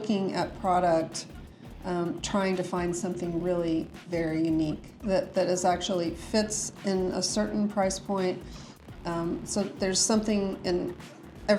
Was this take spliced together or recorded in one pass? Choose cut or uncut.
uncut